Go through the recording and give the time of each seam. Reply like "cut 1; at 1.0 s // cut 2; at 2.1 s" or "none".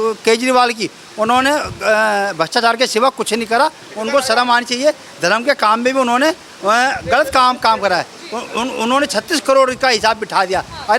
none